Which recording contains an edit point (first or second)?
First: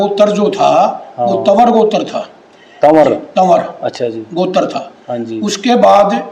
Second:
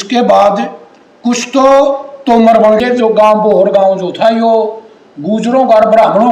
second